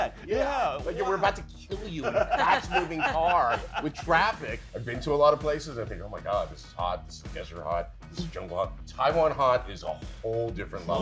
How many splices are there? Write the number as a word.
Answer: one